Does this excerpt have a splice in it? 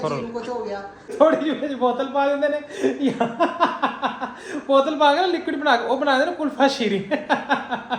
yes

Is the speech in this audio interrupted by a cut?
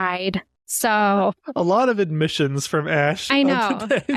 no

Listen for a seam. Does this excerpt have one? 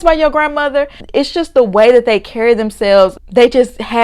yes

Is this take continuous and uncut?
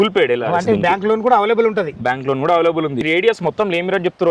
no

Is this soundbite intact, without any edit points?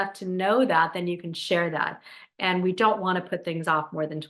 yes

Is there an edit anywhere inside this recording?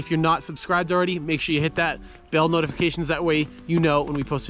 no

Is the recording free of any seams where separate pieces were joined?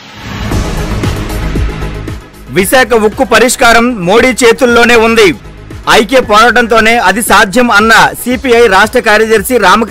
no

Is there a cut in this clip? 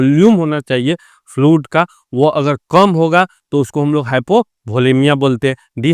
no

